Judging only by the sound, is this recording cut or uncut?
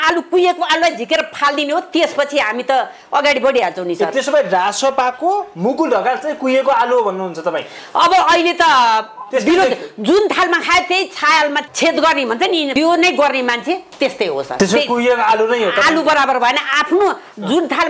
cut